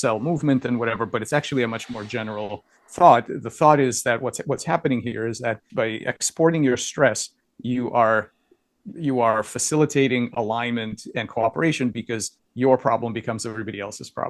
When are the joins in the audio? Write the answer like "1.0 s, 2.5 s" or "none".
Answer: 5.7 s